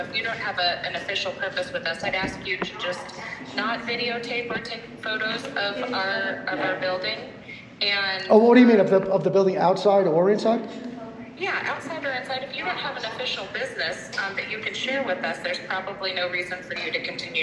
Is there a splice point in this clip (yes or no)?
no